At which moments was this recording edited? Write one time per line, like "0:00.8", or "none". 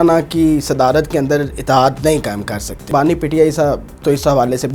0:02.9